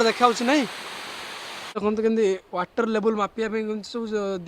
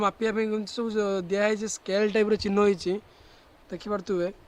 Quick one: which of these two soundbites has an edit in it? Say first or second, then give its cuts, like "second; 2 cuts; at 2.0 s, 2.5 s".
first; 1 cut; at 1.8 s